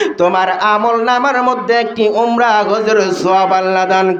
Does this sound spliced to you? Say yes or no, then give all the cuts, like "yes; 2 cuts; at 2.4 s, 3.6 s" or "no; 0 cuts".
no; 0 cuts